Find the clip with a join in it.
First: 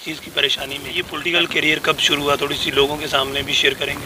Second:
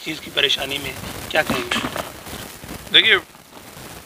first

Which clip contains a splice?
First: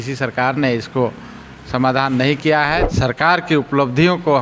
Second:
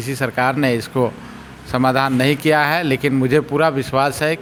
first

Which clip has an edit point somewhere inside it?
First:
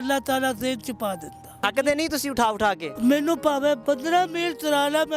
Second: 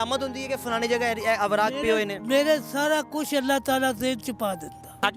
first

